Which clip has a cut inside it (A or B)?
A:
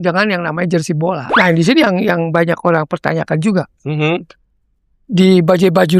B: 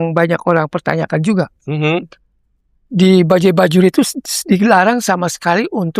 A